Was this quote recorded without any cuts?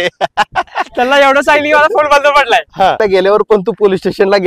no; 1 cut; at 3.0 s

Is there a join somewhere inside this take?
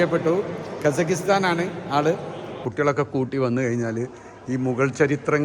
yes; 1 cut; at 2.6 s

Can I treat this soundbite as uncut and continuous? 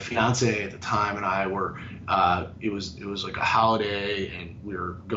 yes; 0 cuts

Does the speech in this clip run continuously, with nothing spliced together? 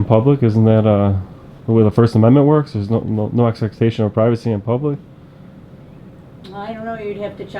yes; 0 cuts

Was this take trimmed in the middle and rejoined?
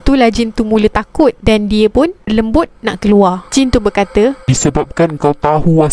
no; 0 cuts

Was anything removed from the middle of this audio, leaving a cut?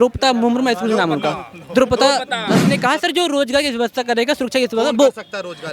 yes; 1 cut; at 2.6 s

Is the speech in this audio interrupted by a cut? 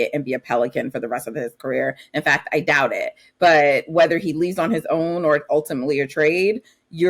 no; 0 cuts

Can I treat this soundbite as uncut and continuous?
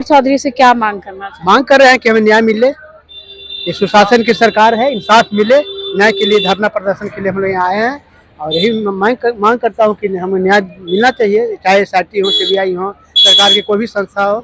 yes; 0 cuts

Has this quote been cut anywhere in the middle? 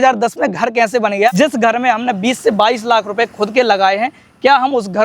yes; 1 cut; at 1.3 s

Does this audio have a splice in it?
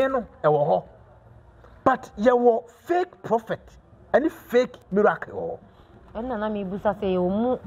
no; 0 cuts

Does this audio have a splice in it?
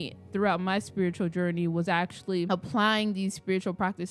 no; 0 cuts

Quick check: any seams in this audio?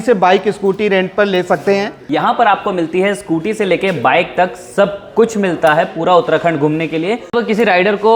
yes; 2 cuts; at 2.1 s, 7.3 s

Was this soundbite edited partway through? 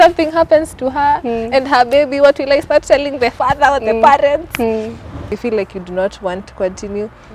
yes; 1 cut; at 5.3 s

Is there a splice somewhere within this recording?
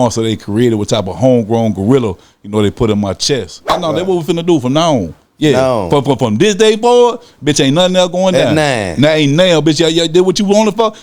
yes; 1 cut; at 3.8 s

